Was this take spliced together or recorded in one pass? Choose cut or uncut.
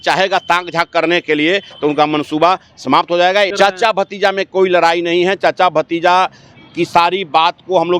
cut